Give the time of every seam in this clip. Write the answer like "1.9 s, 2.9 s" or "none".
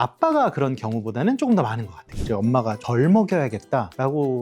2.1 s